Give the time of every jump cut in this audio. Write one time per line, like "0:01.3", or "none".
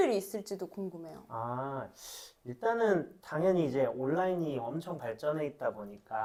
none